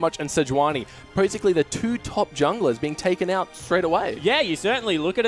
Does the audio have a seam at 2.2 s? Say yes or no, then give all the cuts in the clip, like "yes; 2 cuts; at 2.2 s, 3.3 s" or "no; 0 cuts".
yes; 1 cut; at 2.2 s